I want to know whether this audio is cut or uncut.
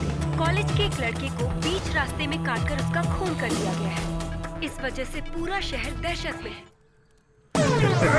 cut